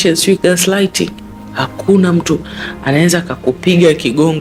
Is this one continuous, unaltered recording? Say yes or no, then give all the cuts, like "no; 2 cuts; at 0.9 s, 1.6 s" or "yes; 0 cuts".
yes; 0 cuts